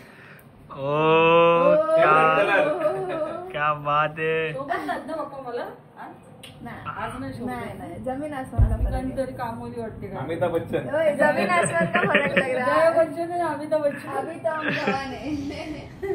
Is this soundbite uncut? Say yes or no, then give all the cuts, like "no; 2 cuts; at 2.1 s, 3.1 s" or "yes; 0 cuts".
yes; 0 cuts